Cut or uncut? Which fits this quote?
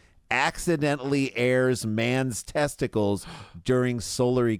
uncut